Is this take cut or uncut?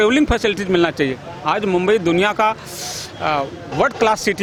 uncut